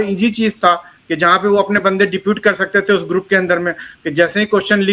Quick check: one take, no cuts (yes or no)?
yes